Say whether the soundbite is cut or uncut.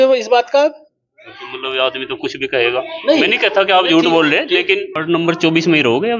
cut